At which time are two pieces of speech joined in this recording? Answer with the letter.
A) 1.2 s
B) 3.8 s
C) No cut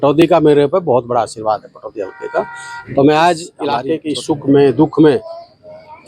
B